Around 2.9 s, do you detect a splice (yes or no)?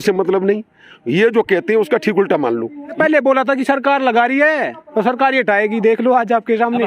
yes